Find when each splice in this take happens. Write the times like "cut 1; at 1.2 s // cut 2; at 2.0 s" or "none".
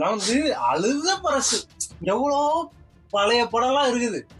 none

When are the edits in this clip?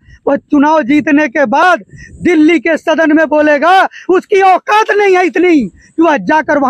none

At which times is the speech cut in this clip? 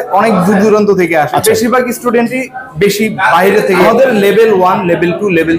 cut 1; at 3.8 s

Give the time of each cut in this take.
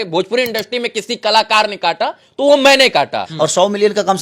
cut 1; at 3.2 s

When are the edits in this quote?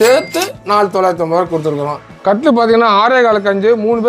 cut 1; at 2.1 s

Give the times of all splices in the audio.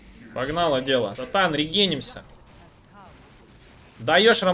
cut 1; at 1.2 s

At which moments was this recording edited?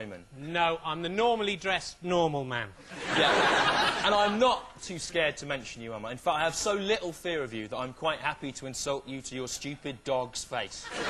cut 1; at 4.5 s

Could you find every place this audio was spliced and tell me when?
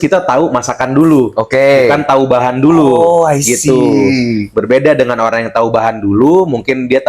none

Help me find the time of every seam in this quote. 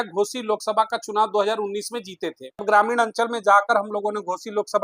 cut 1; at 2.6 s

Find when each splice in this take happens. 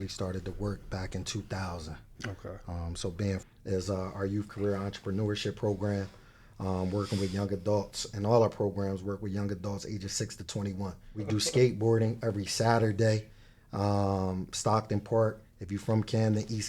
cut 1; at 3.4 s // cut 2; at 11.1 s

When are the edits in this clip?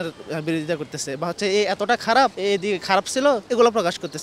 cut 1; at 2.4 s // cut 2; at 3.4 s

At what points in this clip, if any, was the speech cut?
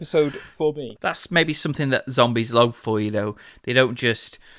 cut 1; at 0.9 s

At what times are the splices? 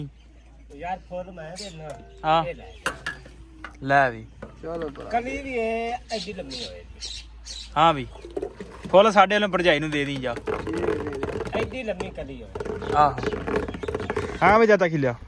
cut 1; at 14.3 s

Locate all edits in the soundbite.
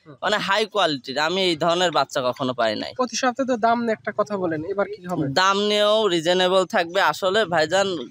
none

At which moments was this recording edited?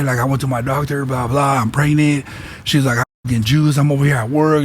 none

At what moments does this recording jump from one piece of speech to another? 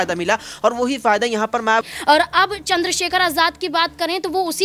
cut 1; at 1.8 s

